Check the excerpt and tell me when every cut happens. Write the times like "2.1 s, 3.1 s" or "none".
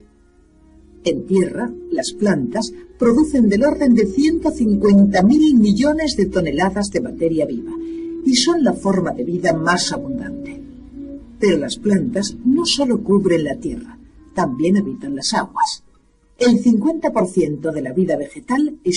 14.6 s